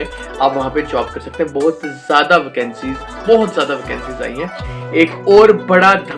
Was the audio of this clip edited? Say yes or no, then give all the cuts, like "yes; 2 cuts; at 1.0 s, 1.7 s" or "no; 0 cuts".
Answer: yes; 1 cut; at 4.6 s